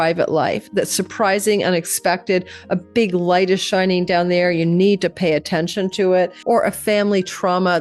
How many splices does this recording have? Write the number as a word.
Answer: one